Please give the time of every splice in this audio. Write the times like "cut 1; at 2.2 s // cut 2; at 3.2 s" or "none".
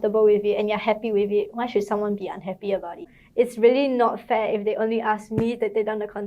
cut 1; at 3.1 s